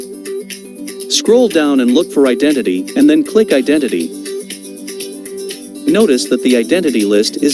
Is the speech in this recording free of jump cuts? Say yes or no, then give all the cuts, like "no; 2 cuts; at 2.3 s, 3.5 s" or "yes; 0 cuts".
yes; 0 cuts